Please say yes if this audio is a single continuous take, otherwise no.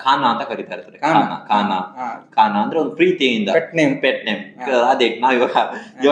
yes